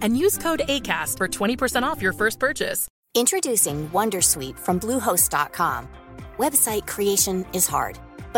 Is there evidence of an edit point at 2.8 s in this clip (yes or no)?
yes